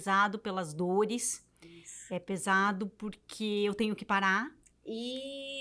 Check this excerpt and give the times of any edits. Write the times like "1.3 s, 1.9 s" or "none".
none